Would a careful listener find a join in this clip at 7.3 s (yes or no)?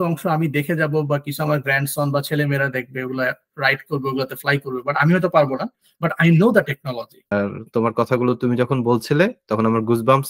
yes